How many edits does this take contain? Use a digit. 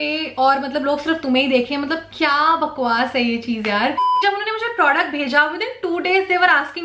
1